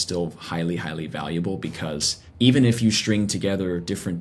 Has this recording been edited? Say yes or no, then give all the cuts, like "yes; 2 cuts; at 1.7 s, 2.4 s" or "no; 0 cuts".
yes; 1 cut; at 2.2 s